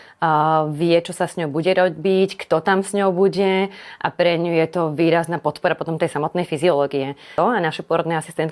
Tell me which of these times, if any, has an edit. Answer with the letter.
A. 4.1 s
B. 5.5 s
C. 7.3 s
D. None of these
C